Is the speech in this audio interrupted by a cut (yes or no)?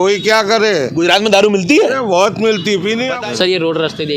yes